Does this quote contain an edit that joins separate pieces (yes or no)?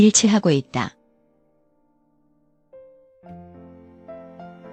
no